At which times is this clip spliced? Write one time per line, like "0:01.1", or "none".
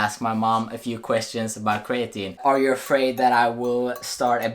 0:02.4